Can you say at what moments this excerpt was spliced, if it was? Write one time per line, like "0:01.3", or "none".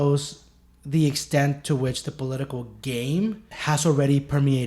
0:03.5